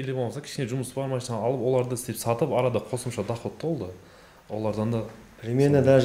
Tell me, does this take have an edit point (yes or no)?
no